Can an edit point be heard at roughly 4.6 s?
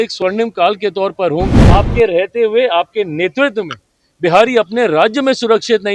no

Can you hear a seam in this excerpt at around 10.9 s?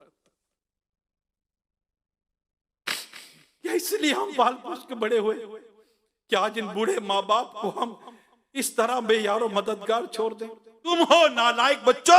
yes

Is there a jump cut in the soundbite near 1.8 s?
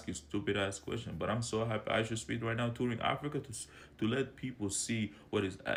no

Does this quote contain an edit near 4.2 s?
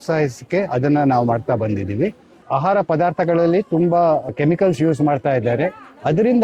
yes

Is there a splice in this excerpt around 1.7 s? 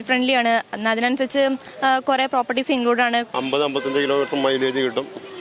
no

